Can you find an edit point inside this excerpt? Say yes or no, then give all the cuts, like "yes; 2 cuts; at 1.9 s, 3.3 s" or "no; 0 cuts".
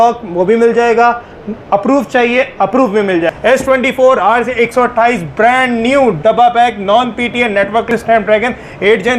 yes; 2 cuts; at 3.3 s, 7.9 s